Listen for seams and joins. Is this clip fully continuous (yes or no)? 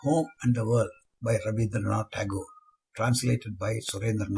no